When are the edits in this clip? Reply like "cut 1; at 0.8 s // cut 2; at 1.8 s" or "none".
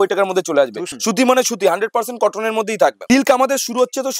cut 1; at 0.9 s // cut 2; at 3.0 s